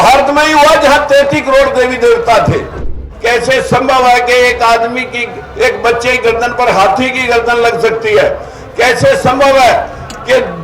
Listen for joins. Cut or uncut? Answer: cut